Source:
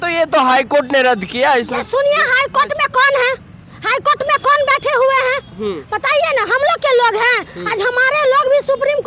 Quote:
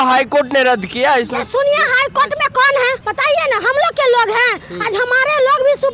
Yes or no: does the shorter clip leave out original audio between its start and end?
yes